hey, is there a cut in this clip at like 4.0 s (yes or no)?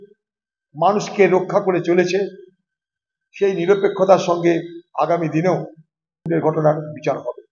no